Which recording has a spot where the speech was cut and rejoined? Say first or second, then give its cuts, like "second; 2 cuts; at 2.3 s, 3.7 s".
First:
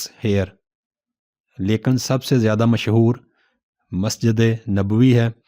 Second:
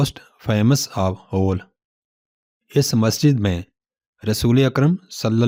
first; 1 cut; at 1.1 s